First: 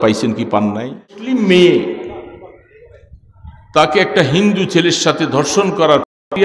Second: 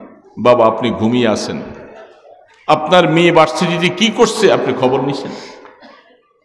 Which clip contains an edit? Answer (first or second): first